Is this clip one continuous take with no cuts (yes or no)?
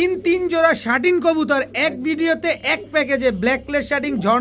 yes